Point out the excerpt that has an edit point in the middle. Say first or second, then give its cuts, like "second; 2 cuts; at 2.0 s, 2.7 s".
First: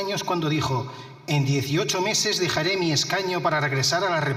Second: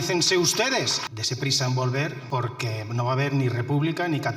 second; 2 cuts; at 1.0 s, 2.2 s